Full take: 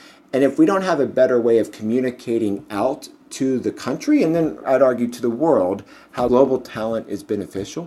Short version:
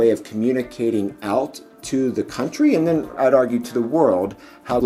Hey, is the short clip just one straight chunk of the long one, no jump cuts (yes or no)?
yes